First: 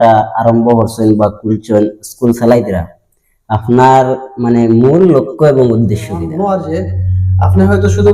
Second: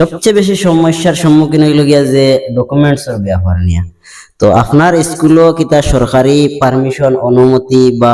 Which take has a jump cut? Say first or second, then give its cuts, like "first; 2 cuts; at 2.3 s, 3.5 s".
first; 1 cut; at 6.2 s